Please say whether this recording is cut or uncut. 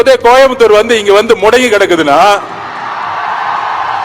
uncut